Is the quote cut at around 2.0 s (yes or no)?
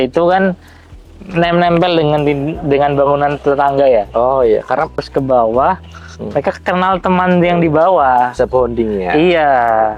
no